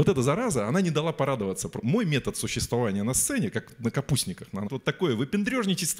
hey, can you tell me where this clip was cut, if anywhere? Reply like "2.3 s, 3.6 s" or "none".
1.8 s, 4.7 s